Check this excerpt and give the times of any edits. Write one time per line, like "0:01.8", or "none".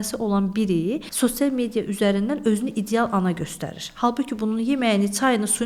0:01.1